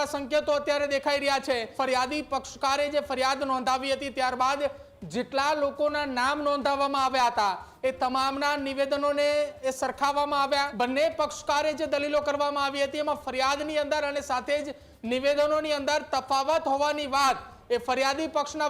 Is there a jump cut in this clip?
yes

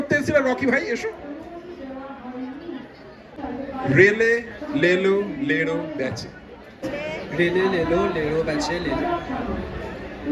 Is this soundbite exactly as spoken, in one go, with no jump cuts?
no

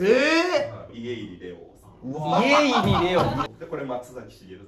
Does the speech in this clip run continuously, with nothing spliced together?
no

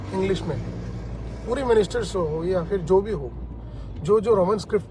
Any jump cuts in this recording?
no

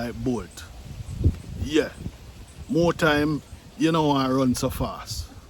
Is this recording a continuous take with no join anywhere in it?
yes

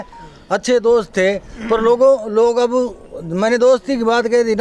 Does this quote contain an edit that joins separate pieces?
no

